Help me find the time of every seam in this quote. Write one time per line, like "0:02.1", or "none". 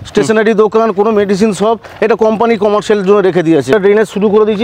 0:03.7